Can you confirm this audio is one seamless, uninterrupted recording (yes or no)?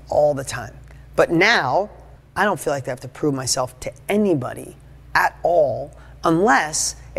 yes